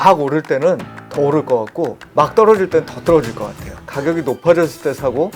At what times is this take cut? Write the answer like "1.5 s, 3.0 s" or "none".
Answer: 3.7 s